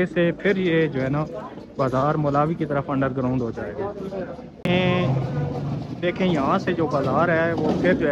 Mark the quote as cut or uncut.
uncut